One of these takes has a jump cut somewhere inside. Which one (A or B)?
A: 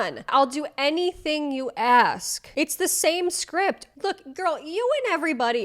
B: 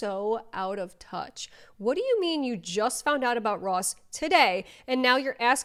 A